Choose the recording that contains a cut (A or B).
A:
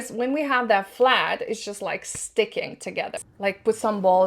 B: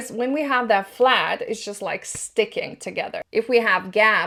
A